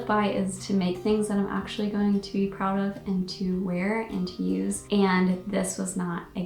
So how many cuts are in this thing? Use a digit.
1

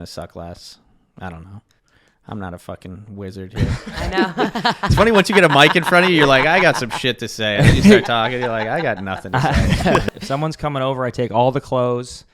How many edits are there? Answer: 1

